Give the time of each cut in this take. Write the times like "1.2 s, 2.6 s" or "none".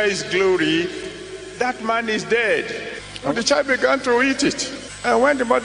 3.3 s